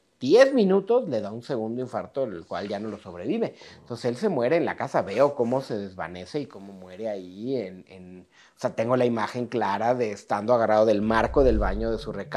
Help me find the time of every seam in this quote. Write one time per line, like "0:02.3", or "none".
none